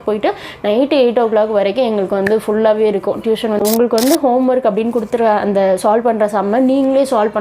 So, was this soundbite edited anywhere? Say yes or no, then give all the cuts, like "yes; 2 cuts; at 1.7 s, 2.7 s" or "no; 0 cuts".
yes; 1 cut; at 3.6 s